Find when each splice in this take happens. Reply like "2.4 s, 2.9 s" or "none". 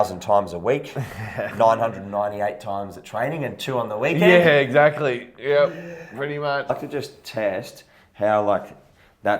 6.7 s

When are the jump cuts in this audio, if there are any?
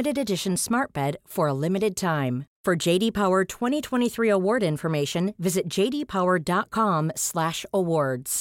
none

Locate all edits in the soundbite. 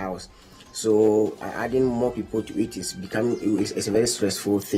1.4 s

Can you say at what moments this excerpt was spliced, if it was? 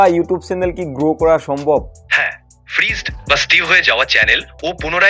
2.0 s

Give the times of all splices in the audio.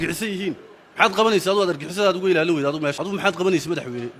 3.0 s

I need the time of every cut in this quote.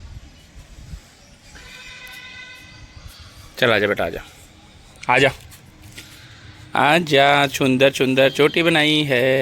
8.3 s

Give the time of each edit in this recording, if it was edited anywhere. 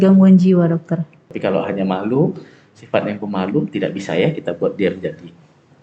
1.3 s

